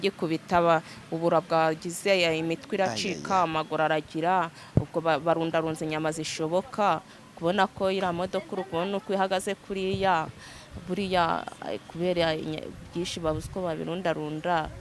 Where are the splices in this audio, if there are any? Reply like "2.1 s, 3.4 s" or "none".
none